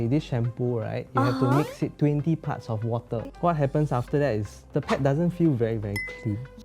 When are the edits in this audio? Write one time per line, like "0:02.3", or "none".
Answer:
0:03.3